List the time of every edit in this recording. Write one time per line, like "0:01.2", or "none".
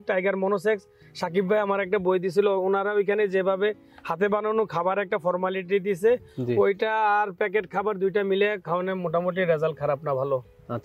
none